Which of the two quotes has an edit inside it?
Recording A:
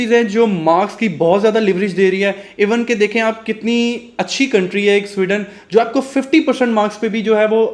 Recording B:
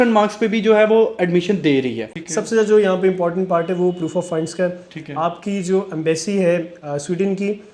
B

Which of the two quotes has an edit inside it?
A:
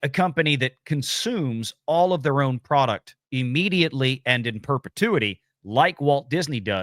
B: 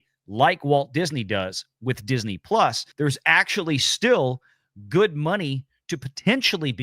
B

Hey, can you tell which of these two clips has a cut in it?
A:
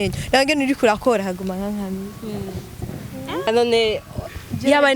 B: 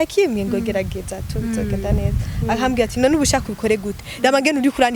A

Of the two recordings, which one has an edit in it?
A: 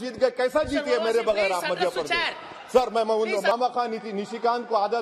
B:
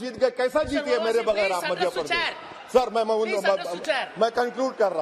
A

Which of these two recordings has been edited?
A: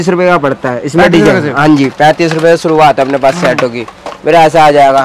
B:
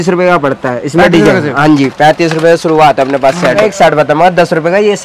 B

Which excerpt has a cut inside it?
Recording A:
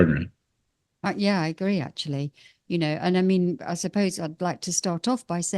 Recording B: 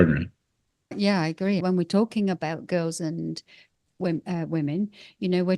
B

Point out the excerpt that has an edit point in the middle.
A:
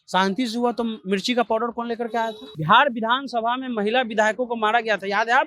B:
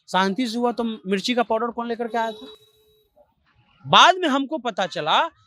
A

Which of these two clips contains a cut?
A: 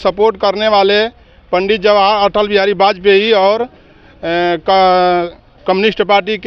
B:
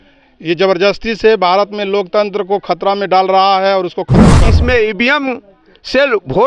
B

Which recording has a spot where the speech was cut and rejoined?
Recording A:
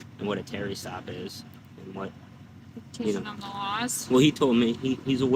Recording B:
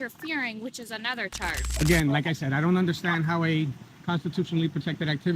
B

